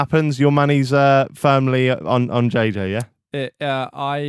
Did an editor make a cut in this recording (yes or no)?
no